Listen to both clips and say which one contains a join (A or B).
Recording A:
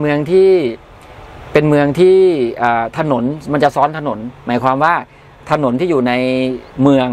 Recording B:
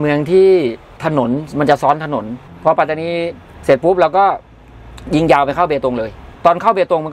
B